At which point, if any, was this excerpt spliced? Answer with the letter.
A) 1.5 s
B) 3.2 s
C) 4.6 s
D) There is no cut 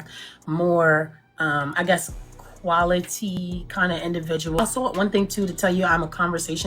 C